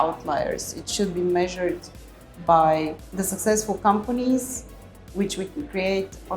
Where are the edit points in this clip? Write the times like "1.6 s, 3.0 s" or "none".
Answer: 3.0 s